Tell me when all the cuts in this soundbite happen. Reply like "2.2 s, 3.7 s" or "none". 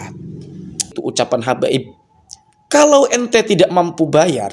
1.0 s

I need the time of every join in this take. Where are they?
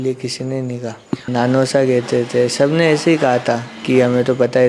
1.2 s

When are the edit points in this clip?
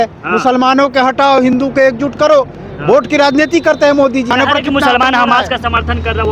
4.3 s

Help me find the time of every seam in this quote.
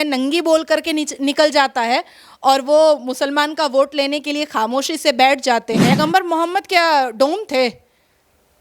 6.0 s

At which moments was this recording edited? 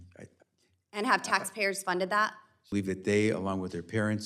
2.7 s

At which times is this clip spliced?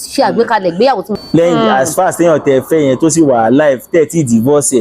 1.1 s

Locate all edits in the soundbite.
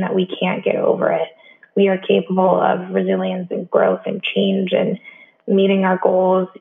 none

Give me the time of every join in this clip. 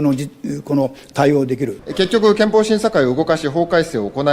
1.8 s

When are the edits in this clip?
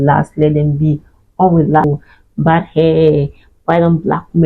1.8 s

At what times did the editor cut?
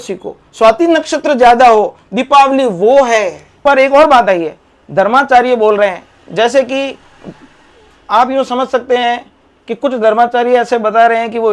3.4 s

